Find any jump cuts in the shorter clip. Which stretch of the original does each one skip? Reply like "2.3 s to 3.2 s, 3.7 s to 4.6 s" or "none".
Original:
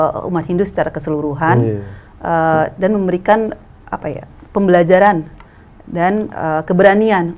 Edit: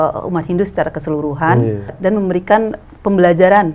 2.0 s to 2.7 s, 3.6 s to 4.4 s